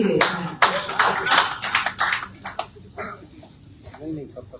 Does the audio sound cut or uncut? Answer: uncut